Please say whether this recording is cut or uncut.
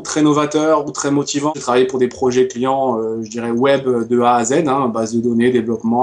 cut